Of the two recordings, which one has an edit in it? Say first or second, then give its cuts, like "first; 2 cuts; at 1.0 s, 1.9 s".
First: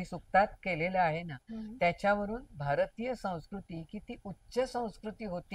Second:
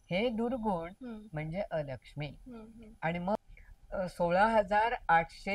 second; 1 cut; at 3.3 s